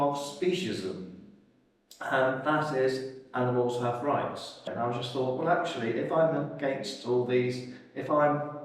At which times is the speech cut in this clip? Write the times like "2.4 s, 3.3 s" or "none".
4.7 s